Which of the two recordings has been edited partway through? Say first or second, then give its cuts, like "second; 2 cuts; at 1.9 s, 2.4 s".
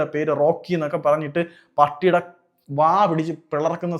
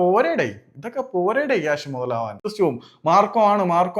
second; 1 cut; at 2.5 s